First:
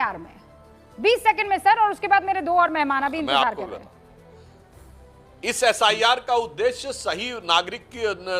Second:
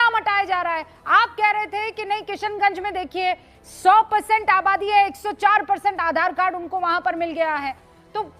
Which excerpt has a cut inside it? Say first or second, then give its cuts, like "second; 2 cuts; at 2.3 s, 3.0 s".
first; 1 cut; at 4.2 s